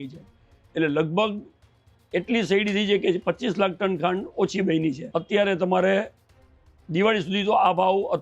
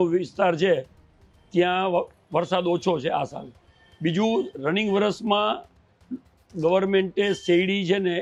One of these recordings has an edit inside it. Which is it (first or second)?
first